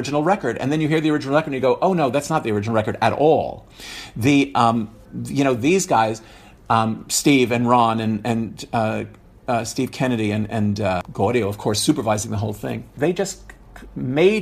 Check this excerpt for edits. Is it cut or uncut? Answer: cut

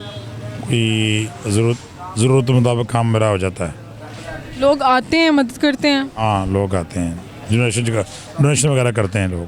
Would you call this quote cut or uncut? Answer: uncut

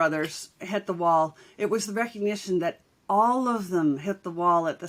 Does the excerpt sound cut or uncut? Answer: uncut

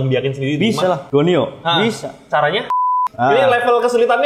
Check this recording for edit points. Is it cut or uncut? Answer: cut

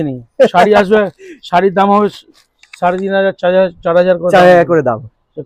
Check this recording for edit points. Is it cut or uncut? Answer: uncut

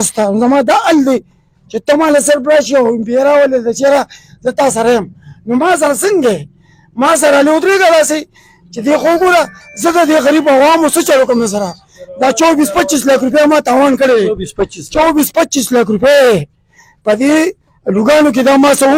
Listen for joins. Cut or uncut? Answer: uncut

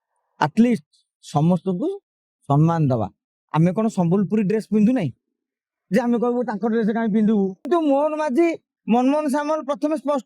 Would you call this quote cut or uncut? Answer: cut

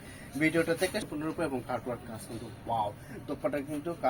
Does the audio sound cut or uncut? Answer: cut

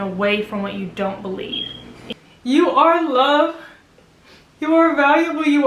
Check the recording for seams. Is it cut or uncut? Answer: cut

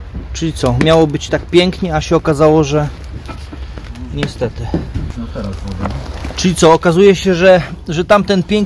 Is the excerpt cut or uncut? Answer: uncut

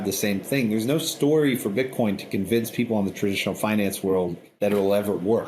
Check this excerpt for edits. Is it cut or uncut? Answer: cut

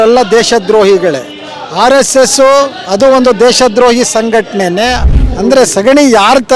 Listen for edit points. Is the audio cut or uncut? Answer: cut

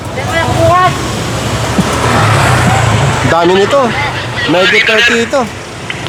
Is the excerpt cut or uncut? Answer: uncut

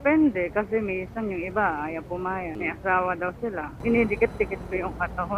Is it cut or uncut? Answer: cut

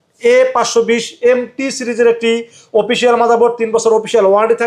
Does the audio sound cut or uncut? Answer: uncut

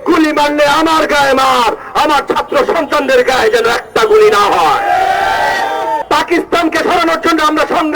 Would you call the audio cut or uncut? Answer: cut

